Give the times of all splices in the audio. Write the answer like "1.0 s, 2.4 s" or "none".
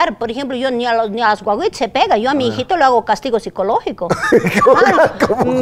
none